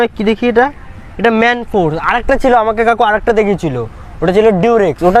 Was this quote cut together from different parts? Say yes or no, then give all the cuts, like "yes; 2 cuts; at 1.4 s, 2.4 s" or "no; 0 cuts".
no; 0 cuts